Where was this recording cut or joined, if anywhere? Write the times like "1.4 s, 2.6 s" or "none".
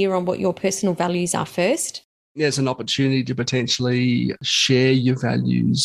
2.4 s, 4.4 s

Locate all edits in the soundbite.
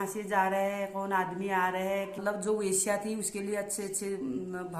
2.2 s

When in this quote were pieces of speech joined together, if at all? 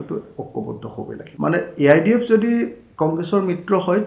1.2 s

